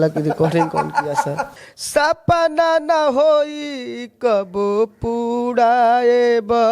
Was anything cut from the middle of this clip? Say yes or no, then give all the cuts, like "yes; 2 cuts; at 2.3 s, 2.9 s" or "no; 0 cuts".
yes; 1 cut; at 1.6 s